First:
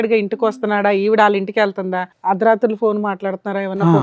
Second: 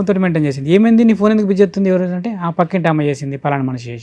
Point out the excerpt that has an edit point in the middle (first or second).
first